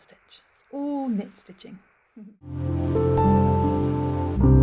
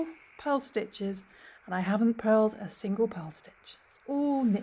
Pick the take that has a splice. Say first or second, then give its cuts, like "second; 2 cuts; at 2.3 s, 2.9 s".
first; 1 cut; at 2.3 s